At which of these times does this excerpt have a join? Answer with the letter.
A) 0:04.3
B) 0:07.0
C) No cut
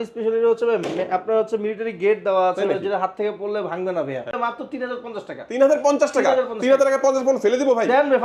A